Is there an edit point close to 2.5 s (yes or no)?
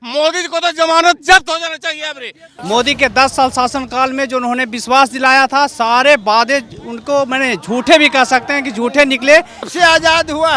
yes